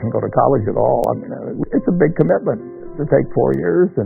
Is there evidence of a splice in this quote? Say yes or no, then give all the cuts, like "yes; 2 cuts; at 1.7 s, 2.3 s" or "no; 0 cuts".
yes; 1 cut; at 1.6 s